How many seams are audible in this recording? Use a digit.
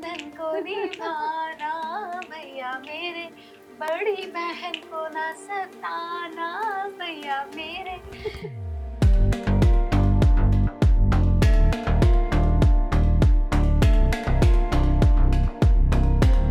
0